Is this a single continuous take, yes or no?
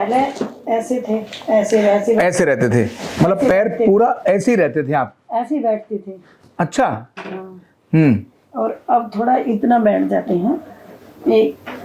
yes